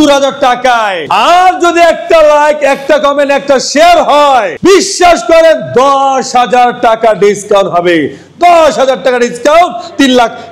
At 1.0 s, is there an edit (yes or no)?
yes